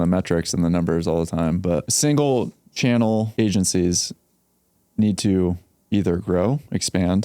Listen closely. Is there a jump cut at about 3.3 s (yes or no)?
yes